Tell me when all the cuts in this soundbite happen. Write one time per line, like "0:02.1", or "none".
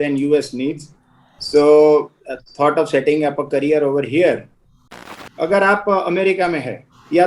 0:05.1